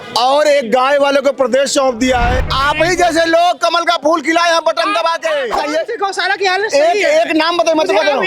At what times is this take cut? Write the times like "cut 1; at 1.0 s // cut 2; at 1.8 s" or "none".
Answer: cut 1; at 2.4 s // cut 2; at 5.6 s